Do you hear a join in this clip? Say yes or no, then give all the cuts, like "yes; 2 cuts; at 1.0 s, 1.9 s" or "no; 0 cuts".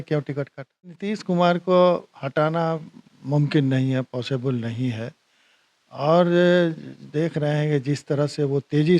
yes; 1 cut; at 1.0 s